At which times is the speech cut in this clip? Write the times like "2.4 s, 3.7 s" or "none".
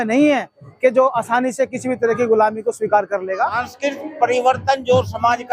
3.7 s